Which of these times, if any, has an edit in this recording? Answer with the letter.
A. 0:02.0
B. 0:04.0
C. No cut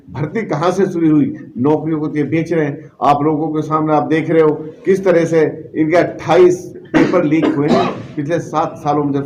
C